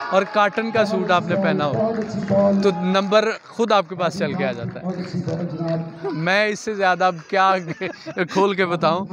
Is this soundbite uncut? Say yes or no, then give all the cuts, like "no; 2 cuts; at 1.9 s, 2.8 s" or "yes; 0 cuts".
yes; 0 cuts